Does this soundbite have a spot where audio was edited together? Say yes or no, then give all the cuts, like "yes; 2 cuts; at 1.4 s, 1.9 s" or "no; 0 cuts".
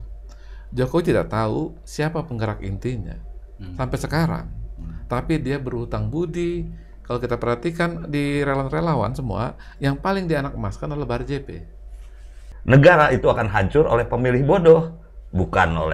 yes; 1 cut; at 12.5 s